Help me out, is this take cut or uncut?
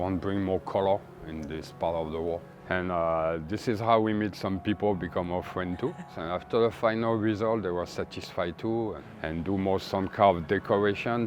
cut